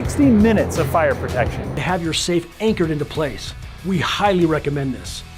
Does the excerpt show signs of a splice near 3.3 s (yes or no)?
no